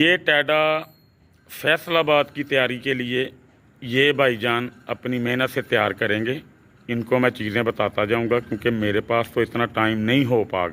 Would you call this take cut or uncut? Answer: uncut